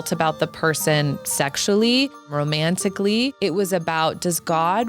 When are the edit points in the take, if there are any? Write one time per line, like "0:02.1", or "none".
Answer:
0:02.3
0:03.3